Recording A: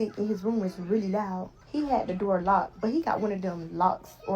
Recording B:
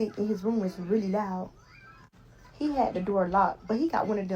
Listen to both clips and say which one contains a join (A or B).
A